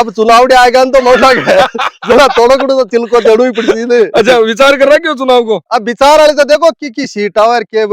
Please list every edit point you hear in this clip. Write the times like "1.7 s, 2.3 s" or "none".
none